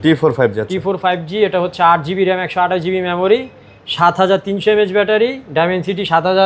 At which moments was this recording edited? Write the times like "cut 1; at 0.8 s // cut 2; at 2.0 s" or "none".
none